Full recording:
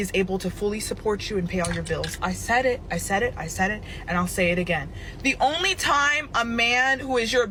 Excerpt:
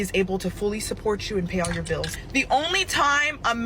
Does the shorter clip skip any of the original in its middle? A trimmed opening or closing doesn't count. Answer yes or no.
yes